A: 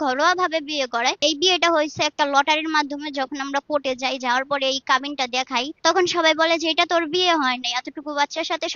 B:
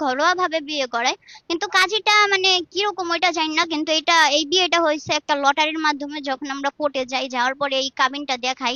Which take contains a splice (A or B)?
A